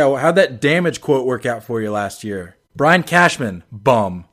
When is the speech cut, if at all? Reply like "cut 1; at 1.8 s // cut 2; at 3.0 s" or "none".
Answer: cut 1; at 2.6 s

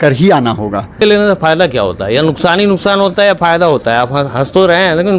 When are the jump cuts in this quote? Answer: cut 1; at 1.0 s

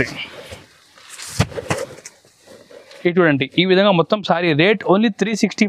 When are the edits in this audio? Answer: none

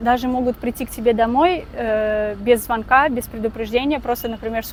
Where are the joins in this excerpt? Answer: none

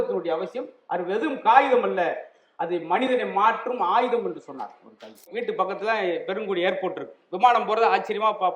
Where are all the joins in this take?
cut 1; at 5.3 s

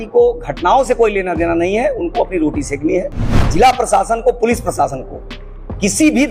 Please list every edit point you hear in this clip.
cut 1; at 3.4 s

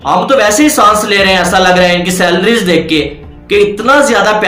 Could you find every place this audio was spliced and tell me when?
none

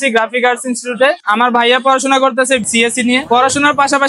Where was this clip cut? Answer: cut 1; at 1.2 s

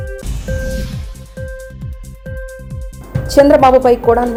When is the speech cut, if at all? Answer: none

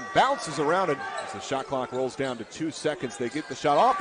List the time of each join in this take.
cut 1; at 1.0 s

